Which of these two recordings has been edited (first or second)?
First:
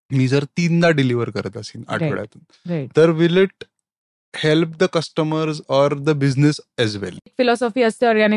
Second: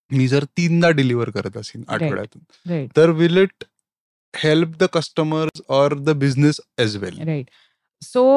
first